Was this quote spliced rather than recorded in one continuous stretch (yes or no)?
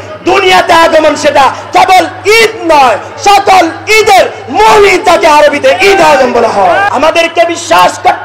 yes